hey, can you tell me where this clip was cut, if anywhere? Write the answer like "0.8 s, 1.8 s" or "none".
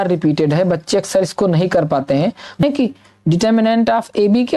2.6 s